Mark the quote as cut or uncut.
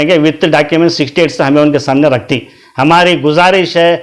uncut